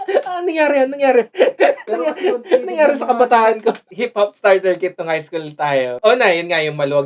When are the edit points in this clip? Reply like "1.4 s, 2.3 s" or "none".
3.9 s, 5.9 s